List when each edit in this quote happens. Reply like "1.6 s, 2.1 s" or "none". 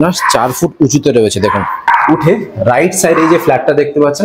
1.8 s